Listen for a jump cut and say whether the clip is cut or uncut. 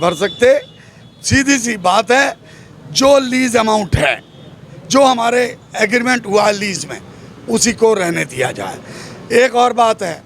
uncut